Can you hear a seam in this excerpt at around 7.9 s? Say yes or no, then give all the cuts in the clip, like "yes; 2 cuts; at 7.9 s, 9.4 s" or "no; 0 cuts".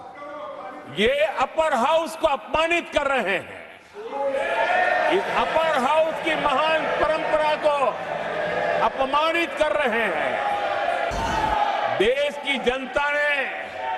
no; 1 cut; at 11.1 s